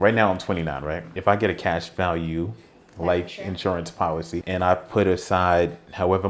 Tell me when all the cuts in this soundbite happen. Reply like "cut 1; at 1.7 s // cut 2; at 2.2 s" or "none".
cut 1; at 1.1 s // cut 2; at 4.4 s